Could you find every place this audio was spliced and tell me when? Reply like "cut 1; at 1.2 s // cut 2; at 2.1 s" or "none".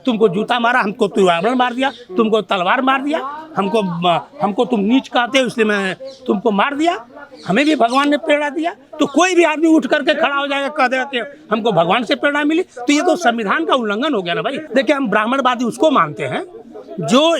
cut 1; at 14.6 s